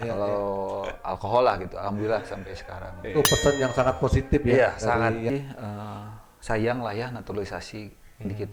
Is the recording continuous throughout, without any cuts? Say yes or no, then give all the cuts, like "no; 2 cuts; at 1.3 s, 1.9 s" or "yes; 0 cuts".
no; 1 cut; at 5.3 s